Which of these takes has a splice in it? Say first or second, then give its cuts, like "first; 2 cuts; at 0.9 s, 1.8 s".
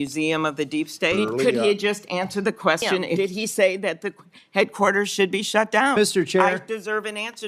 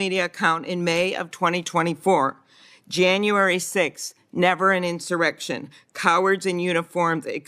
first; 2 cuts; at 1.2 s, 3.2 s